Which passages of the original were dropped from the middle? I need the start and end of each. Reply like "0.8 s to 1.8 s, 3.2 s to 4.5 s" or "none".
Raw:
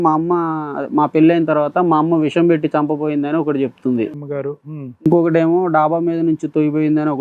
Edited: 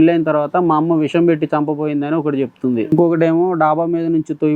4.1 s to 5.0 s